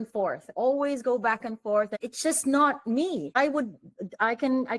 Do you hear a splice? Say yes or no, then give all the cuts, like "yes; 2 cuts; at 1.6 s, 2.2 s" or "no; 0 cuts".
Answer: yes; 2 cuts; at 1.9 s, 3.3 s